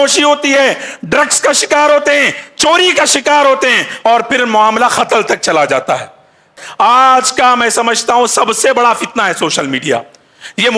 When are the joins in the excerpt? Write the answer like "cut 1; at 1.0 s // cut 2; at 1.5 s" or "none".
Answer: cut 1; at 6.5 s

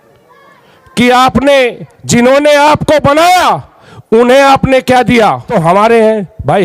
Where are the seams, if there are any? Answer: cut 1; at 5.5 s

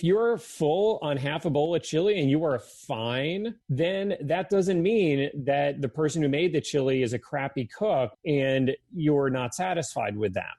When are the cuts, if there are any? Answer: cut 1; at 3.6 s // cut 2; at 8.2 s

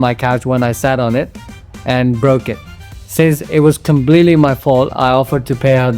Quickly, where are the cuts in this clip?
none

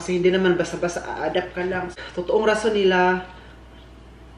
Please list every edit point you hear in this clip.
cut 1; at 1.9 s

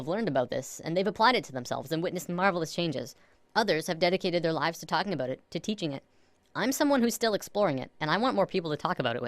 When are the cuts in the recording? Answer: cut 1; at 7.2 s

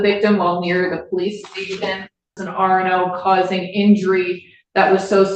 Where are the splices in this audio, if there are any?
cut 1; at 2.4 s

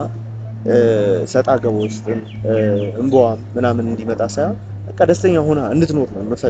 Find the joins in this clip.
none

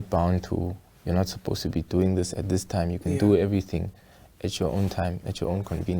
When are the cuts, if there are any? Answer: none

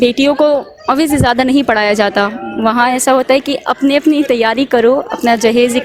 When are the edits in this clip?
none

